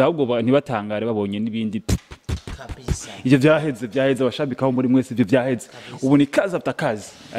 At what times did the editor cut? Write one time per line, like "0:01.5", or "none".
none